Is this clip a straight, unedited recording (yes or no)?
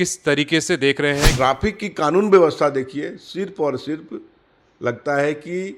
no